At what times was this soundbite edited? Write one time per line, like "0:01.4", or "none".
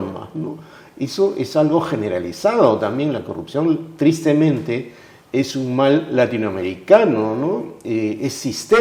none